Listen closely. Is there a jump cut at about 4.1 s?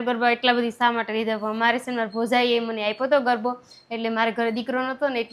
no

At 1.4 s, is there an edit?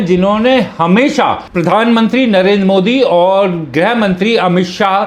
yes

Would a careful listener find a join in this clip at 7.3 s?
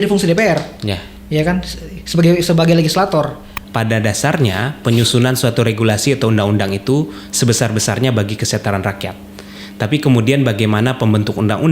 no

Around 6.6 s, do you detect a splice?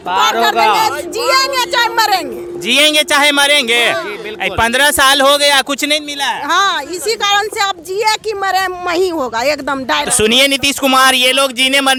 no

